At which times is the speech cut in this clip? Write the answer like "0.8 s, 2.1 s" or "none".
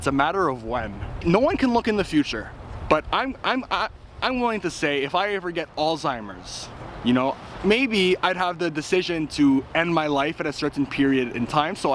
1.2 s